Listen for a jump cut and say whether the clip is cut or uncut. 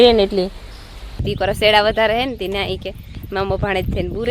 cut